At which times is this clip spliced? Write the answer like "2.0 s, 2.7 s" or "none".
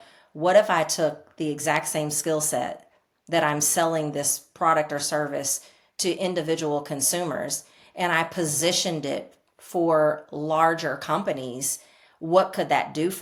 none